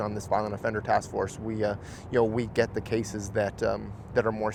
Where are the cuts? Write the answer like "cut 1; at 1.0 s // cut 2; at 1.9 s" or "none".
none